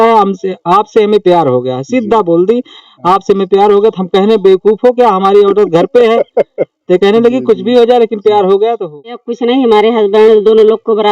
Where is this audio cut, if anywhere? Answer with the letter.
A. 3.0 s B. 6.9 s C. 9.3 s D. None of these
C